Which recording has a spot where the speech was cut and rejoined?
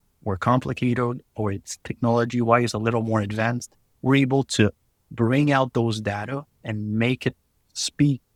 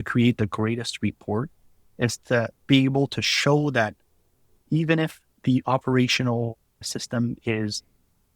second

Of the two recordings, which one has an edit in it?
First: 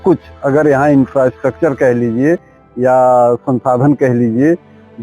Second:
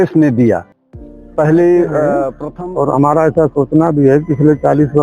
second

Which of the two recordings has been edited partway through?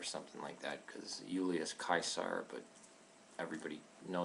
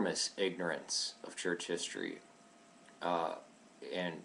first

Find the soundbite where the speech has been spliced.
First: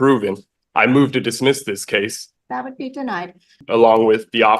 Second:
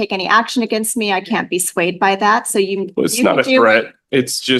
first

